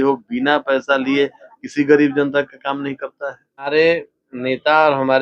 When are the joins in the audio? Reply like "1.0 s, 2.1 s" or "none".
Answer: 3.7 s

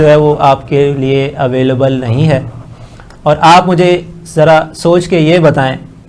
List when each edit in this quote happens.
none

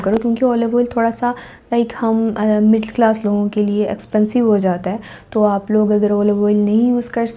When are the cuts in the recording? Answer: none

